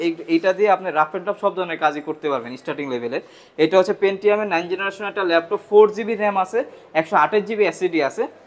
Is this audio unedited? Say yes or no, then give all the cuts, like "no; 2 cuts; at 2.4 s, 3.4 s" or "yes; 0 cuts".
yes; 0 cuts